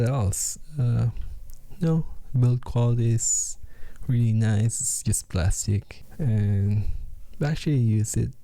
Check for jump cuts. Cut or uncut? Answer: cut